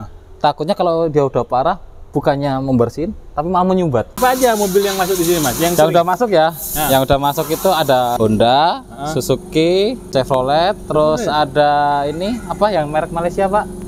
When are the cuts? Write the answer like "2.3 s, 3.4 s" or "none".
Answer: 4.1 s, 8.1 s, 10.0 s